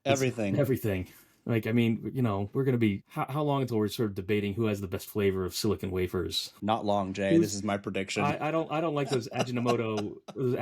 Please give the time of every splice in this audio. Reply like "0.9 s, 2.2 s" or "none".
3.1 s, 6.4 s